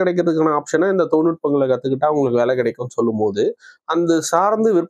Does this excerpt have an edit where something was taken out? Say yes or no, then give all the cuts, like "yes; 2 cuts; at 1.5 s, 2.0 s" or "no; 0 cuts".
no; 0 cuts